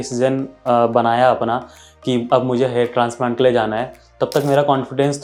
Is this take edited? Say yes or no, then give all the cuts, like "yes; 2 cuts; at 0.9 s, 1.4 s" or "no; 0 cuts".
no; 0 cuts